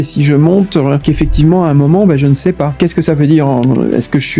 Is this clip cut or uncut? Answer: cut